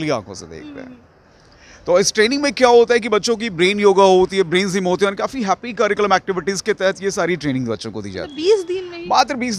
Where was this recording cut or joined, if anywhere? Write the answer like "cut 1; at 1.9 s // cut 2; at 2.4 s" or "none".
none

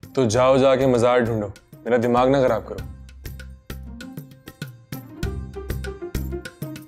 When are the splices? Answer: none

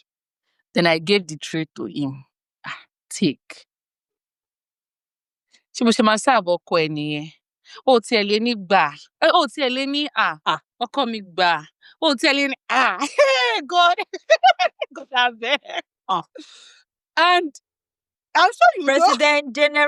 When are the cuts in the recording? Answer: none

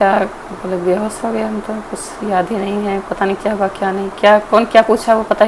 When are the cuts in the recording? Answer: none

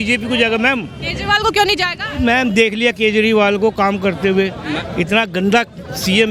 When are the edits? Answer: none

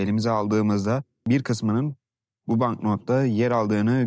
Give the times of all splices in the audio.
cut 1; at 1.2 s

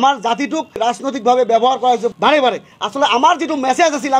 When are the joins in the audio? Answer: cut 1; at 0.8 s // cut 2; at 2.7 s

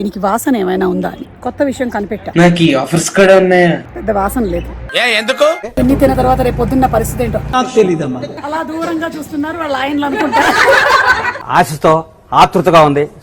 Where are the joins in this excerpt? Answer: cut 1; at 1.3 s // cut 2; at 2.2 s // cut 3; at 3.9 s // cut 4; at 5.7 s // cut 5; at 7.4 s // cut 6; at 8.3 s // cut 7; at 11.3 s

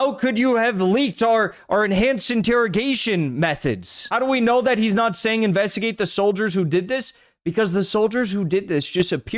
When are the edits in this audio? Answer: none

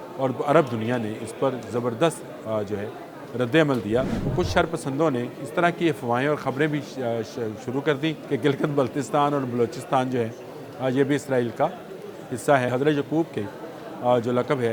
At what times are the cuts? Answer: cut 1; at 4.2 s // cut 2; at 8.2 s // cut 3; at 12.7 s

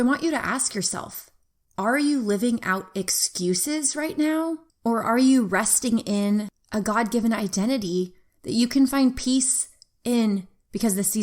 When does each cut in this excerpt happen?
cut 1; at 4.7 s // cut 2; at 6.6 s

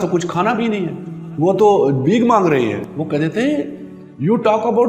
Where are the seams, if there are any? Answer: cut 1; at 2.8 s

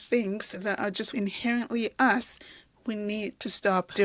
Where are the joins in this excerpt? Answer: none

